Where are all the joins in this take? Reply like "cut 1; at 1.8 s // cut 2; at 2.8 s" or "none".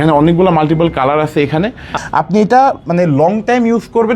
cut 1; at 1.9 s